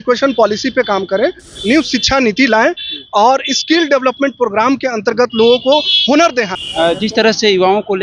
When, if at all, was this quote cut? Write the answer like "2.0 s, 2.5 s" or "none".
6.6 s